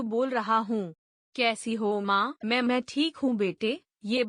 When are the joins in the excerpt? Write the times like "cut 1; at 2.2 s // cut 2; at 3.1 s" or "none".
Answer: cut 1; at 2.3 s